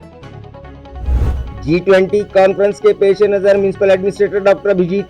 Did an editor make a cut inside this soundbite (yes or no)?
yes